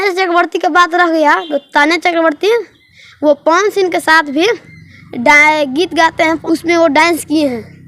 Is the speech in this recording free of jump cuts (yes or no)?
no